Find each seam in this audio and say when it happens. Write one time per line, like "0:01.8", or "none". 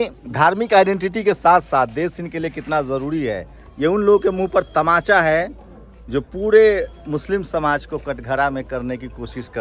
0:03.6